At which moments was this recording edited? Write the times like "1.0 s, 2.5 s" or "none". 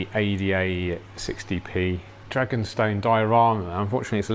2.1 s